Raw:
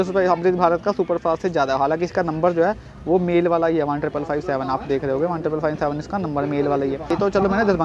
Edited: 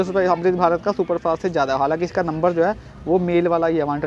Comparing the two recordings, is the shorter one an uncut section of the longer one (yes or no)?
yes